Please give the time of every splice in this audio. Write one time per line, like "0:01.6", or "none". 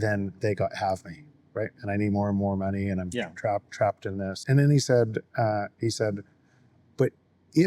0:04.4